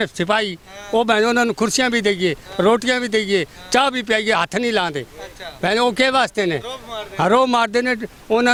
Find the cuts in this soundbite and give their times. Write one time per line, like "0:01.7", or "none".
none